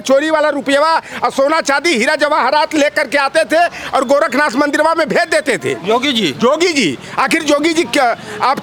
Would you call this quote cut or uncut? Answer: uncut